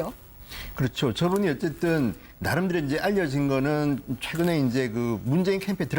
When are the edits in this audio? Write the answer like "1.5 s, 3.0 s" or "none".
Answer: 4.3 s